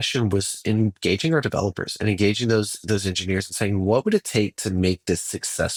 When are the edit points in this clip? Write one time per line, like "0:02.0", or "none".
none